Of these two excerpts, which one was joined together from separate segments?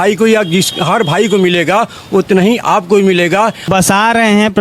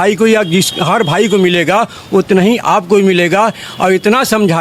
first; 1 cut; at 3.6 s

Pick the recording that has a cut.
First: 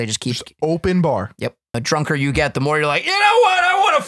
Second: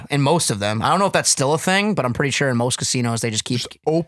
first; 1 cut; at 1.8 s

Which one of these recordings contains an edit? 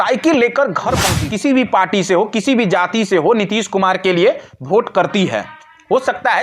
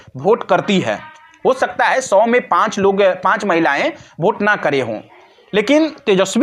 first; 1 cut; at 1.1 s

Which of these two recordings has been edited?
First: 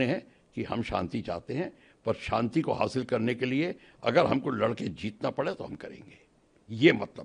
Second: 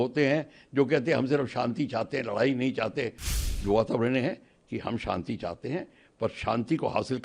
second; 1 cut; at 3.2 s

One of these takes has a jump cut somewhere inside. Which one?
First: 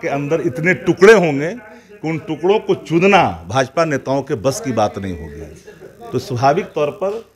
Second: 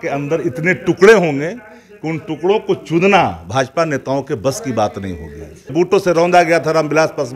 second; 1 cut; at 5.7 s

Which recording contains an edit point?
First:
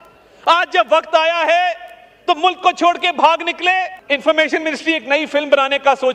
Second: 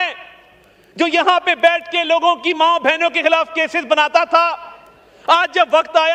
first; 1 cut; at 4.0 s

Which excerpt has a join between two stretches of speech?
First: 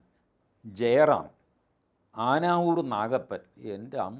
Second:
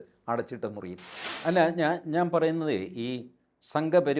second; 1 cut; at 1.4 s

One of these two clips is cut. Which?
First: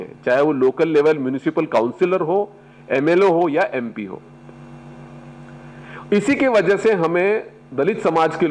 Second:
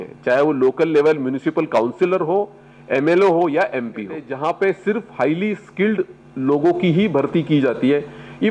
second; 1 cut; at 4.3 s

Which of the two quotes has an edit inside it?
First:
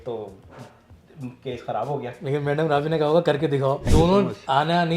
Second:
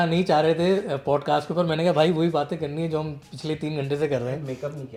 first; 1 cut; at 3.9 s

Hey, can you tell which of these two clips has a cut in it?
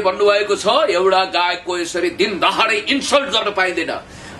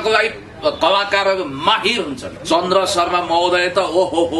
second; 1 cut; at 2.3 s

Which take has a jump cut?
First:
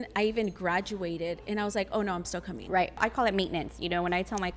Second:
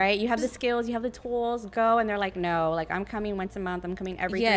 first; 1 cut; at 3.0 s

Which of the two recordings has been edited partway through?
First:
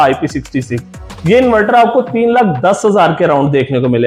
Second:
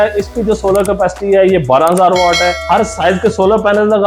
second; 1 cut; at 2.6 s

